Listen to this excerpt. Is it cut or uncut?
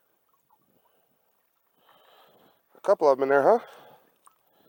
uncut